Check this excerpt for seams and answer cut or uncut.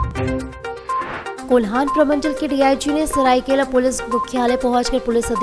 cut